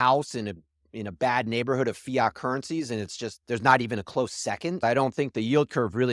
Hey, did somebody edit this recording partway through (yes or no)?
yes